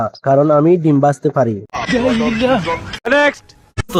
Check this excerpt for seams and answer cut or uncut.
uncut